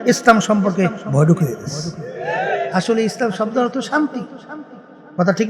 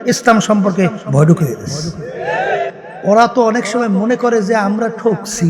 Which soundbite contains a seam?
second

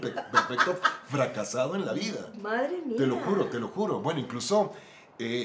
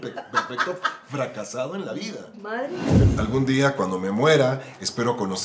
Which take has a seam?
second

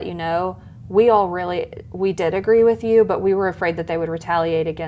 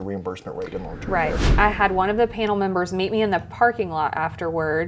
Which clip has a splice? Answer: second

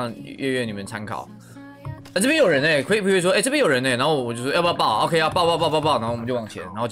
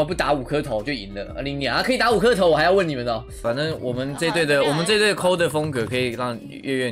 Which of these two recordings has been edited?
second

